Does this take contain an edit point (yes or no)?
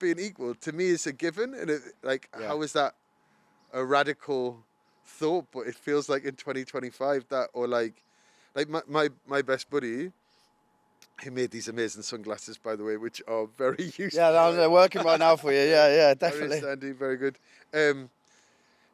no